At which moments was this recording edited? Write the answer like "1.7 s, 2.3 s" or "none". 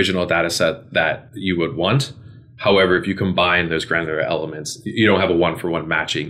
1.3 s